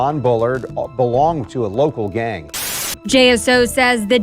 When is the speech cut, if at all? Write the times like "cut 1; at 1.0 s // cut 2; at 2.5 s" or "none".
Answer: cut 1; at 2.6 s